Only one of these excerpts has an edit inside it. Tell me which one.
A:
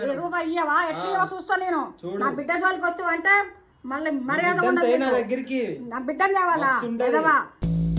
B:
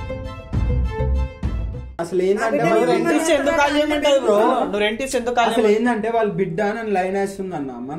B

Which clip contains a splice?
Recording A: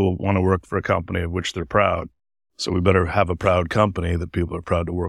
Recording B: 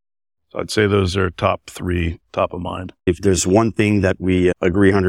B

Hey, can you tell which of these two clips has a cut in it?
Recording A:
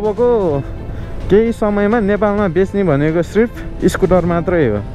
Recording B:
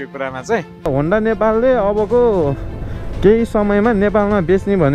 B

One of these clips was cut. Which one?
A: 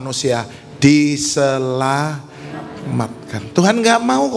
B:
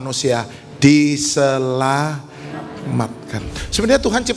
B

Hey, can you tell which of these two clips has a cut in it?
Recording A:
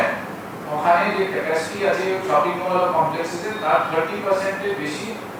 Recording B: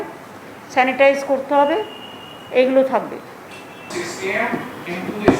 B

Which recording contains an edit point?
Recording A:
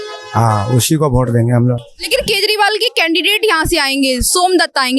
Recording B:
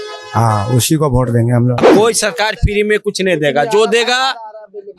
B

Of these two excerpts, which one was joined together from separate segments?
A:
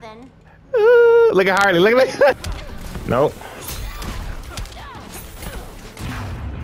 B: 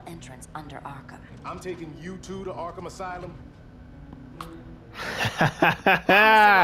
A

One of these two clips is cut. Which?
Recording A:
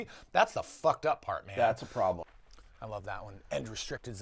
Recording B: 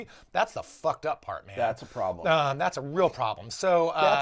A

